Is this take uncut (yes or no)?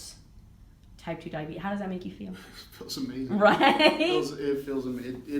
yes